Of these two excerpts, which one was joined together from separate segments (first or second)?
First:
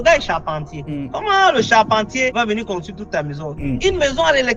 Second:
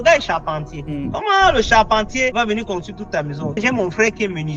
second